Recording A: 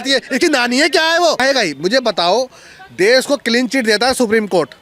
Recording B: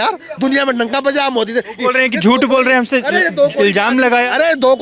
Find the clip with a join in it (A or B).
A